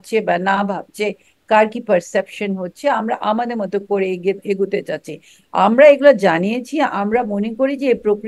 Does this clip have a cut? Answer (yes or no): no